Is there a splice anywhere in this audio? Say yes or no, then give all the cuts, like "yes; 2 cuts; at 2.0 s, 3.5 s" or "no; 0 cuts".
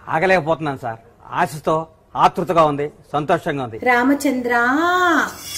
yes; 1 cut; at 3.7 s